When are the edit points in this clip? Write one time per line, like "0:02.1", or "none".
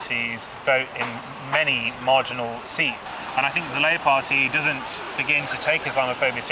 0:03.0